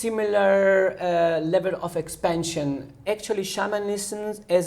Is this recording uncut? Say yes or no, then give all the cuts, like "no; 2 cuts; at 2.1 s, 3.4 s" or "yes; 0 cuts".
no; 1 cut; at 3.0 s